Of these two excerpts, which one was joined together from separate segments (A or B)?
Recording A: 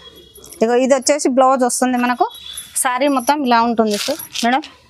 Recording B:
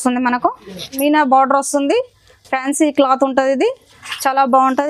B